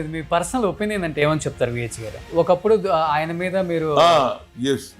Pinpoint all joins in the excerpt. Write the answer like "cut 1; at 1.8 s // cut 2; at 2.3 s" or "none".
cut 1; at 2.3 s